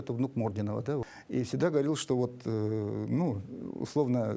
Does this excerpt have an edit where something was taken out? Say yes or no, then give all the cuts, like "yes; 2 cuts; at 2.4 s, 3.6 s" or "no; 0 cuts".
yes; 1 cut; at 1.2 s